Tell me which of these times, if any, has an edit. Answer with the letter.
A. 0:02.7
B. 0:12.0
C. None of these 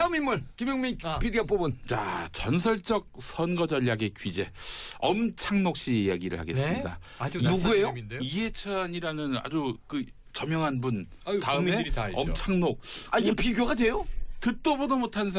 B